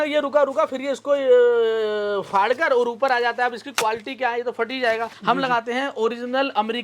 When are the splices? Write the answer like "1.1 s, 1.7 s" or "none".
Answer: 5.1 s